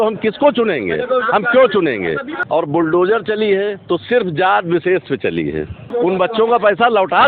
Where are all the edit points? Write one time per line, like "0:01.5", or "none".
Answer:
0:02.3
0:05.8